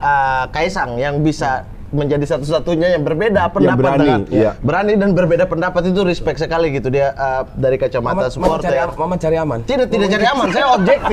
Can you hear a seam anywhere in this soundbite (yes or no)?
no